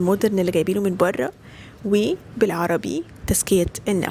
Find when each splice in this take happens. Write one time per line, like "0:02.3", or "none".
0:03.1